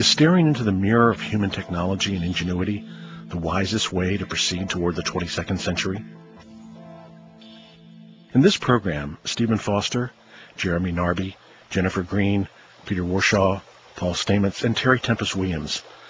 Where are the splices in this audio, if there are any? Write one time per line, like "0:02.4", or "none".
0:01.0